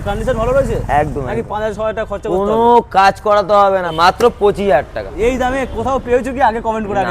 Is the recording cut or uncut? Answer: cut